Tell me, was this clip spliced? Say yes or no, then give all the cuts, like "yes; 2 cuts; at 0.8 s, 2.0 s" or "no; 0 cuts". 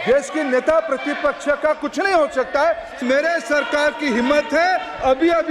yes; 1 cut; at 3.0 s